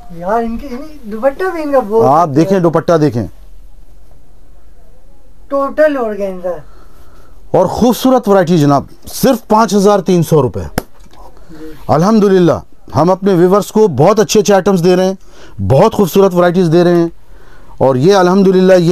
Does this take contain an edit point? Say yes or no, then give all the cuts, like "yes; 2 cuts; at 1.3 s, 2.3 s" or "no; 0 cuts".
no; 0 cuts